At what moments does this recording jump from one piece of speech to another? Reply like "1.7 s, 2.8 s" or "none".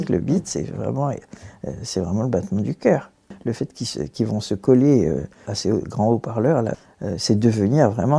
3.4 s, 5.5 s, 6.8 s